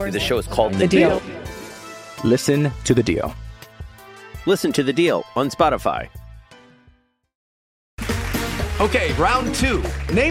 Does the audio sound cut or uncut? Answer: cut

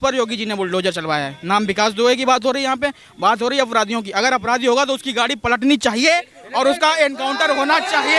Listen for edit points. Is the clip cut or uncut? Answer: uncut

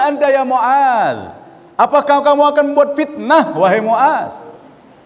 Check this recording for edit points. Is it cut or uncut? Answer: uncut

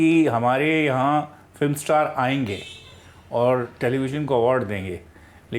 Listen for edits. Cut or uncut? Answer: uncut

